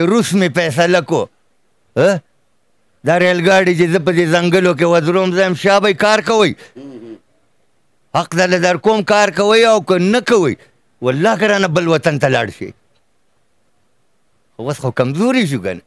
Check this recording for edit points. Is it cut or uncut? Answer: uncut